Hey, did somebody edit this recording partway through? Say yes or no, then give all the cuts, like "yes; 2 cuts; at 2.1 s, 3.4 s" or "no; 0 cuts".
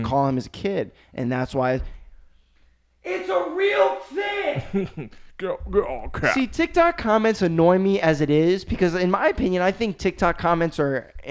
no; 0 cuts